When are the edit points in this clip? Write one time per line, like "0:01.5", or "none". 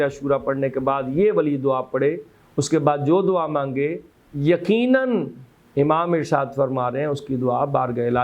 none